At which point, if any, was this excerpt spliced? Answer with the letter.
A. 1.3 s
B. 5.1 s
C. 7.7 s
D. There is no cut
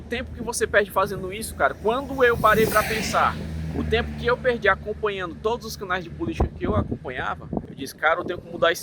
C